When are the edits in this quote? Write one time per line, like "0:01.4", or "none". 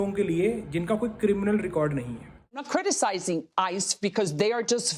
0:02.7

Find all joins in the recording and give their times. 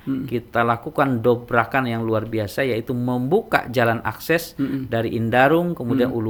none

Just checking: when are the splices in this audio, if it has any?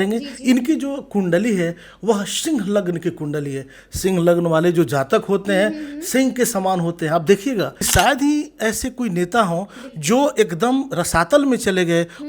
0:07.9

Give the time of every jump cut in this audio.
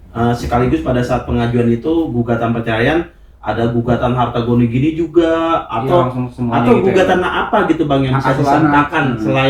none

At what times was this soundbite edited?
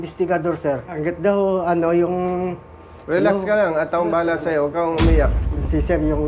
0:00.9

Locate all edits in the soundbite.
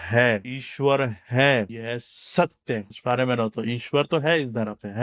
none

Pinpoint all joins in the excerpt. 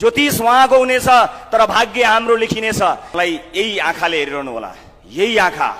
0:03.1

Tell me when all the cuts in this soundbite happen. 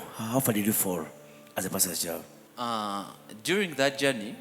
0:02.4

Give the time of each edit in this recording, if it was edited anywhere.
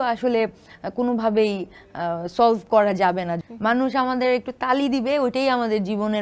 0:03.4

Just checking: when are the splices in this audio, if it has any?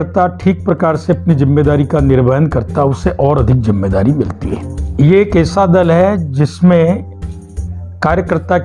0:04.7

